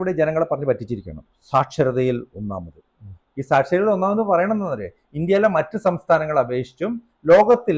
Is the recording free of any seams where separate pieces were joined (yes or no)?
yes